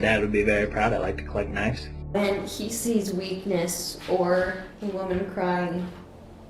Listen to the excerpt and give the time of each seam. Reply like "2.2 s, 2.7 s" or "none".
1.9 s